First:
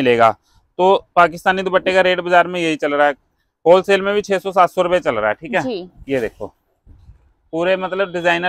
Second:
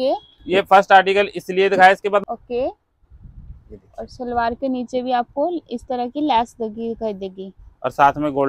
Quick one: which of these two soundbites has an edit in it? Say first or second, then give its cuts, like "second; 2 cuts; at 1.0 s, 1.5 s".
second; 1 cut; at 2.2 s